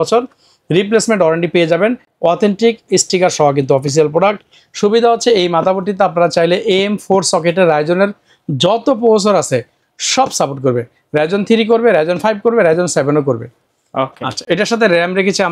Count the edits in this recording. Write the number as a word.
zero